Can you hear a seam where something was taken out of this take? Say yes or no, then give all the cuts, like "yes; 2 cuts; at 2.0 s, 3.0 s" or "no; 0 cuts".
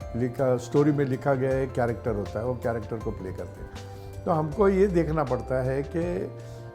no; 0 cuts